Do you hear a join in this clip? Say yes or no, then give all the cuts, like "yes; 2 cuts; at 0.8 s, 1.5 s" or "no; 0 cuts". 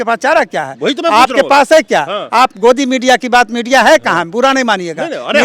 no; 0 cuts